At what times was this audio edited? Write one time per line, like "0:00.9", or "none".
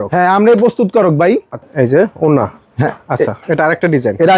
none